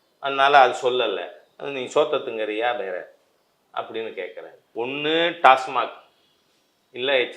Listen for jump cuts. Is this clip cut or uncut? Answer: cut